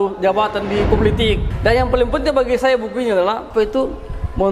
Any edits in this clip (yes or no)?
yes